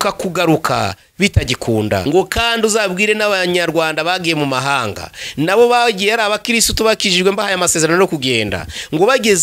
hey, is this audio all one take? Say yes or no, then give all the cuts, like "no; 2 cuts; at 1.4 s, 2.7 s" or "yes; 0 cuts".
no; 1 cut; at 2.0 s